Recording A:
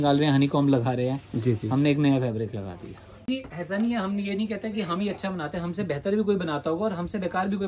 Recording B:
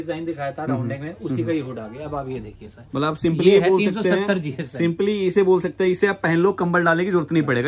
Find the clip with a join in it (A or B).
A